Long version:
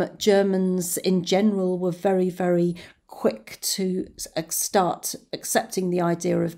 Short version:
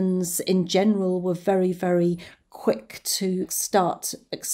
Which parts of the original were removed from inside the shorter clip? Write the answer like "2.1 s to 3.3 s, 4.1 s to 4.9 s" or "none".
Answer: 4.1 s to 4.6 s